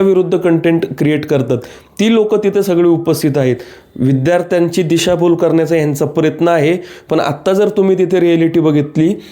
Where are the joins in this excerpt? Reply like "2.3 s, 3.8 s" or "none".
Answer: none